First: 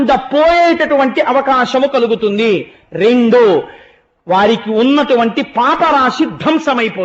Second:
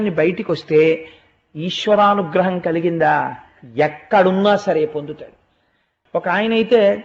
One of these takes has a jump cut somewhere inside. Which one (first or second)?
second